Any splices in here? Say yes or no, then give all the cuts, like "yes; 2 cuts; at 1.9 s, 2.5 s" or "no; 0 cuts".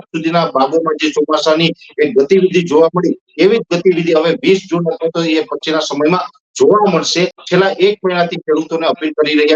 yes; 1 cut; at 7.4 s